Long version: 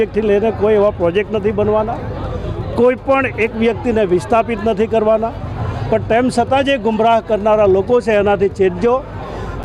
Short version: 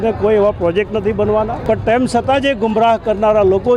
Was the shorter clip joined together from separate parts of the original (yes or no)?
yes